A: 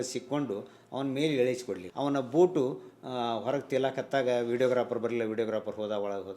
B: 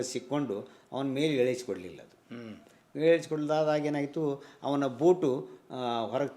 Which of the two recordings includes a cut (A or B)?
A